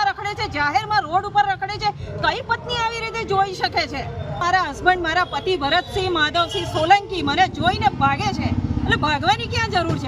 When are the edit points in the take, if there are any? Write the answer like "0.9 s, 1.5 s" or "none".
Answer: 4.4 s